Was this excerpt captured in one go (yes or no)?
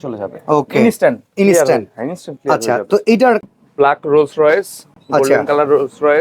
no